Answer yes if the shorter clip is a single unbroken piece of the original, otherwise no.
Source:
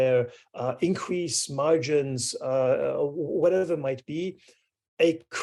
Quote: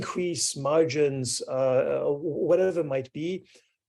yes